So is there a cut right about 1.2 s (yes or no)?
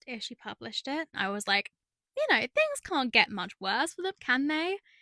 yes